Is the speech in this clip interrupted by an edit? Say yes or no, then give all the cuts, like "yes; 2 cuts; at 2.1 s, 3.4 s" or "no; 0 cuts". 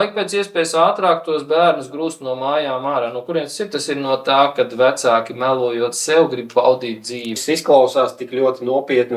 yes; 1 cut; at 7.4 s